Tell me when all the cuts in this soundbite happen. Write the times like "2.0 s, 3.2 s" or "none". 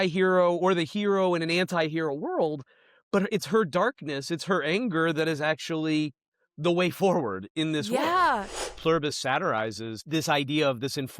8.7 s, 10.0 s